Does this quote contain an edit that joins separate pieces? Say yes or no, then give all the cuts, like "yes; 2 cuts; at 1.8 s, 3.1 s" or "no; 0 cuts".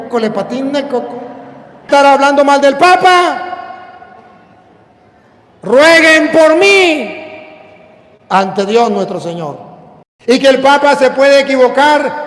yes; 2 cuts; at 1.9 s, 10.3 s